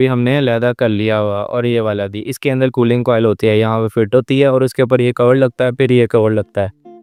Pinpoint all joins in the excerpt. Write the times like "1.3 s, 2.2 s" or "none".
none